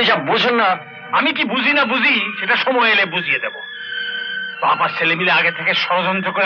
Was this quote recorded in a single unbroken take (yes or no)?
yes